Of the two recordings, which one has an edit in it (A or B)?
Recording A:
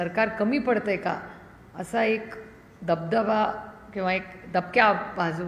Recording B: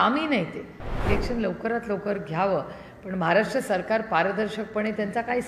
B